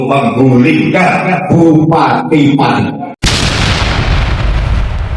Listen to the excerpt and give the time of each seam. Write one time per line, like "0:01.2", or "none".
0:03.1

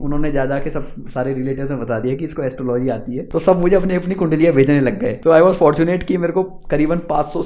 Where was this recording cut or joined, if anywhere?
0:03.2
0:05.1

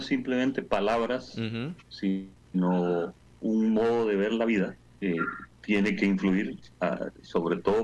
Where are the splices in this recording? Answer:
0:01.9
0:05.0
0:06.6

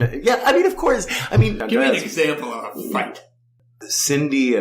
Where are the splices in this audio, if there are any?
0:01.6
0:03.5

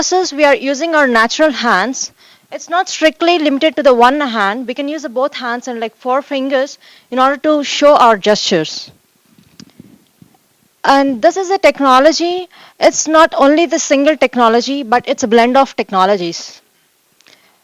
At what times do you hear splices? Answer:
0:02.6

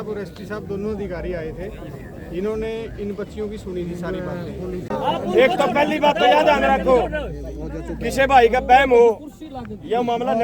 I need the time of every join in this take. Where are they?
0:04.8

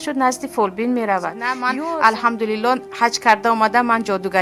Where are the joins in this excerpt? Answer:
0:01.6

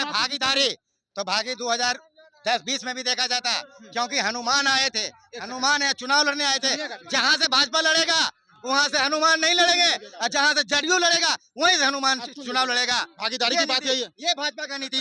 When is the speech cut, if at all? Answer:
none

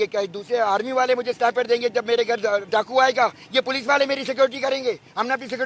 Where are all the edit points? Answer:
none

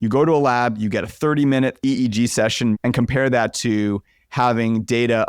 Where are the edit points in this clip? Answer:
0:01.8
0:02.7

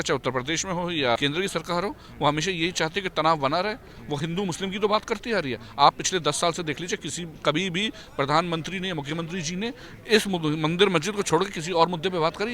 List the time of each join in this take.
0:01.2

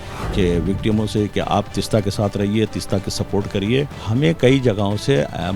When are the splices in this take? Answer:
0:04.0

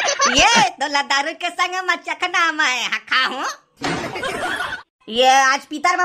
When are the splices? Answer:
0:04.7

